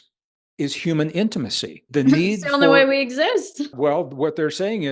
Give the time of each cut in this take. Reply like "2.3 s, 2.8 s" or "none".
1.8 s, 3.7 s